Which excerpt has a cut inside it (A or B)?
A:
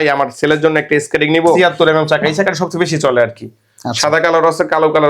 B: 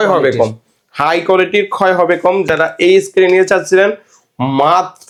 A